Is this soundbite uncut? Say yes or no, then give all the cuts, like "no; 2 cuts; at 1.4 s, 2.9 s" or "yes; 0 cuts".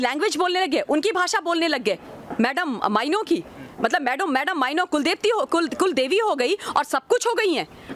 yes; 0 cuts